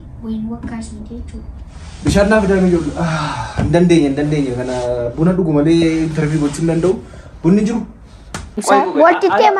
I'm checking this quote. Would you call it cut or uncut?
cut